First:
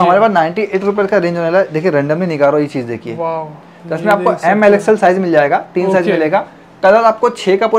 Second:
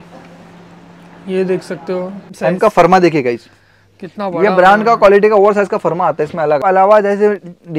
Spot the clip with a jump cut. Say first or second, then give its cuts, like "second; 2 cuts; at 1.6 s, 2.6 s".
second; 2 cuts; at 2.3 s, 6.6 s